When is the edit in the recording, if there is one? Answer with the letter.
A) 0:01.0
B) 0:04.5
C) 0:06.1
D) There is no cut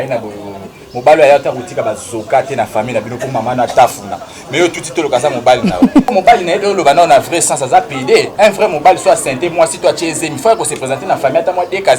C